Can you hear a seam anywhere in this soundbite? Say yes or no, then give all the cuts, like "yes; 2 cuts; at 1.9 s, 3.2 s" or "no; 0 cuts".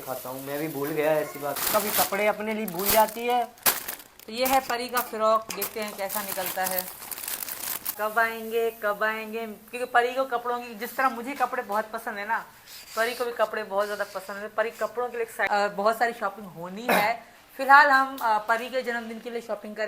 yes; 3 cuts; at 1.6 s, 7.9 s, 15.5 s